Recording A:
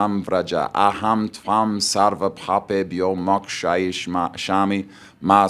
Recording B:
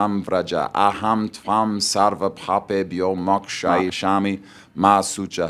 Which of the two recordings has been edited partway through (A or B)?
B